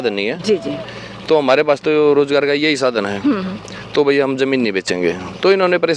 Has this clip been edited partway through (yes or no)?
no